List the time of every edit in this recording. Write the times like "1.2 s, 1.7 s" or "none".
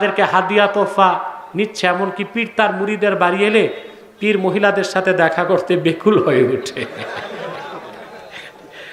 none